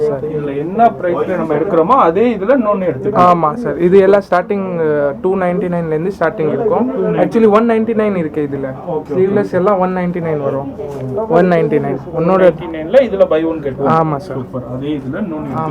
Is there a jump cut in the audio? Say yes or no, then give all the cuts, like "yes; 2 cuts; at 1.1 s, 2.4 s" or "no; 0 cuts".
no; 0 cuts